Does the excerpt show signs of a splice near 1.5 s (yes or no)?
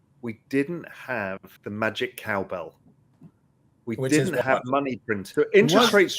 yes